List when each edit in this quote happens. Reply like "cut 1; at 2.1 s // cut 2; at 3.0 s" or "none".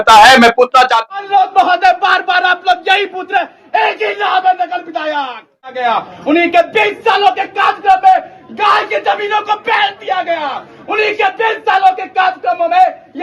cut 1; at 1.0 s // cut 2; at 5.7 s